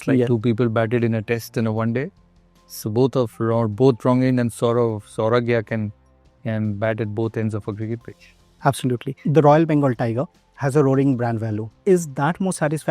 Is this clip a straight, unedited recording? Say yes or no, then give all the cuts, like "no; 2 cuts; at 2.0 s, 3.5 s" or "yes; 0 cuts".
no; 2 cuts; at 9.2 s, 11.7 s